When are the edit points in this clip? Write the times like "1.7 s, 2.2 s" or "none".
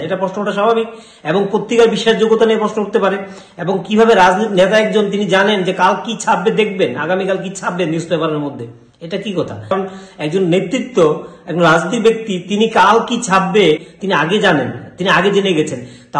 13.9 s